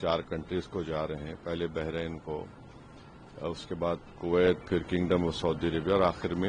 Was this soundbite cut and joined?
no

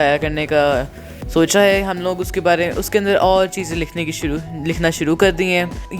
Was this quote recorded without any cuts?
yes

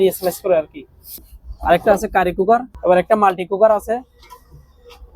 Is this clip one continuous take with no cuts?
no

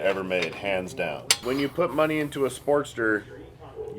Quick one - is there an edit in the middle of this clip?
yes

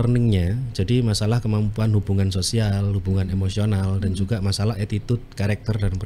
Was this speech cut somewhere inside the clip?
no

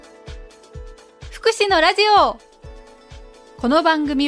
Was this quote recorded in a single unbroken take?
no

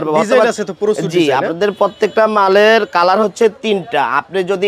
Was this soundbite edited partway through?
no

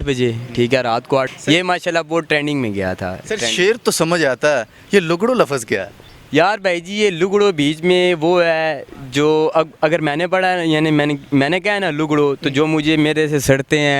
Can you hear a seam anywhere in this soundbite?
yes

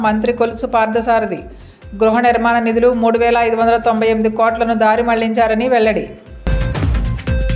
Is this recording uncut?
yes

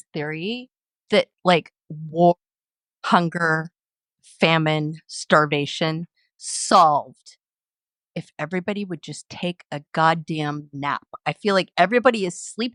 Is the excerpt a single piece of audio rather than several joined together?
yes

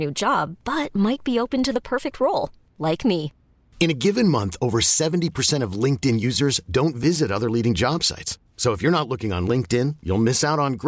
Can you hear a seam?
no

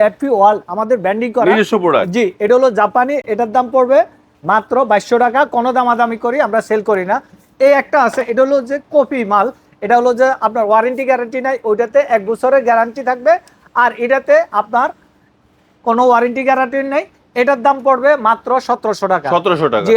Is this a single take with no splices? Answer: yes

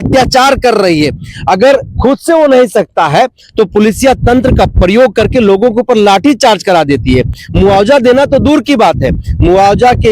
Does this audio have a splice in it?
no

